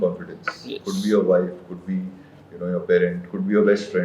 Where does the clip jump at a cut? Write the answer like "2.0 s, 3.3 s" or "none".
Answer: none